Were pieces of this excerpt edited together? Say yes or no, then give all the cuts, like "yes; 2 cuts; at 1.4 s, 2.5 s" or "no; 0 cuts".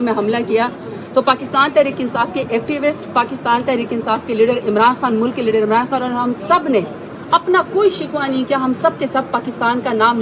no; 0 cuts